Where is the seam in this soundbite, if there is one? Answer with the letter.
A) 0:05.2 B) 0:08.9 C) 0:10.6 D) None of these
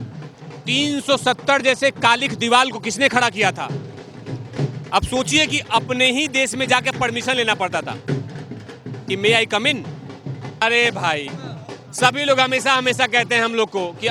C